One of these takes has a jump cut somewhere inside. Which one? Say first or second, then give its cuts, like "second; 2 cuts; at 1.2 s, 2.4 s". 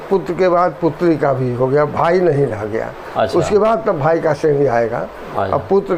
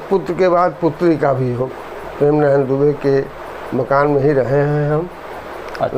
second; 1 cut; at 1.6 s